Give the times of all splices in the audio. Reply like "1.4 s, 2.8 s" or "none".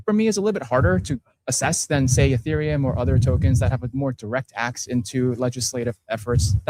none